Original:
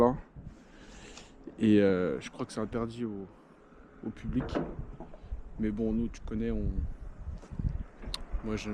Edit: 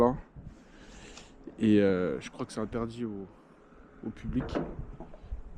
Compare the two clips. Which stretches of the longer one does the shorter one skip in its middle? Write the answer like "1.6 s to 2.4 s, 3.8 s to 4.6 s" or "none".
none